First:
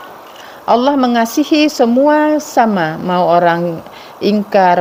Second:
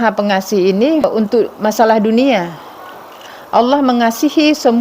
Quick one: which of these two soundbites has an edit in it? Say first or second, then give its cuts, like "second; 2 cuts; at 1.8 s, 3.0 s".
second; 1 cut; at 1.1 s